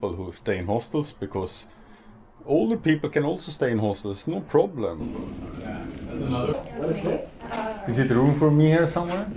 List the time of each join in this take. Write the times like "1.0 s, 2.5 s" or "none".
5.1 s, 6.5 s